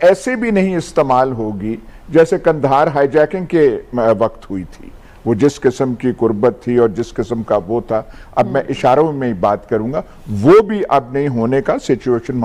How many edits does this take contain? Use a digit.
0